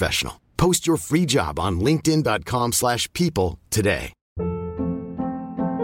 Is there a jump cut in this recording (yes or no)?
yes